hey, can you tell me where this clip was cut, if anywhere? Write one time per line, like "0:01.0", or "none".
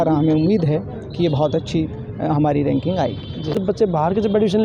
0:03.6